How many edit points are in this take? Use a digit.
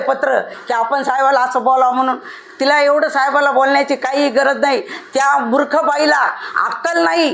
0